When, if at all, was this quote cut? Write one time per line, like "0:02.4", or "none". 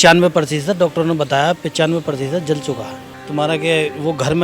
0:03.1